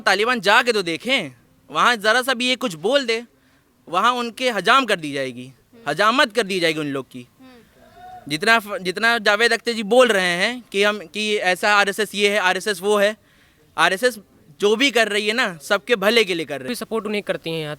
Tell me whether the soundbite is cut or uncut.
cut